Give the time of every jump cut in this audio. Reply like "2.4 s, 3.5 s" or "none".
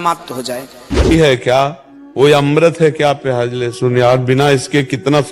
1.1 s